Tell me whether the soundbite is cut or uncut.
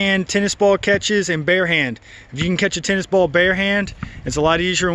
uncut